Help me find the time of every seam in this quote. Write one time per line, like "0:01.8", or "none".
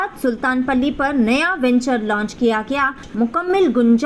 0:03.1